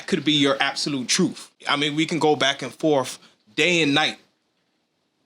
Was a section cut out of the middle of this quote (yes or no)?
yes